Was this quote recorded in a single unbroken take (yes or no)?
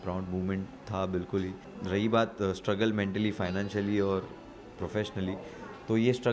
no